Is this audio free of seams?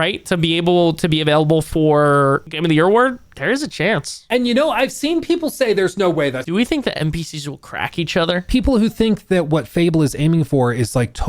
no; 4 cuts; at 2.5 s, 4.1 s, 6.4 s, 8.4 s

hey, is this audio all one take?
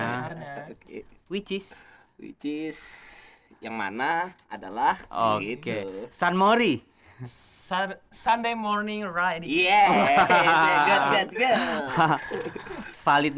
yes; 0 cuts

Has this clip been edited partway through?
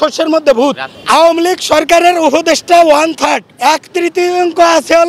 yes; 2 cuts; at 0.9 s, 3.5 s

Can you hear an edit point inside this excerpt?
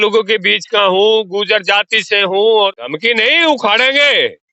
yes; 1 cut; at 2.8 s

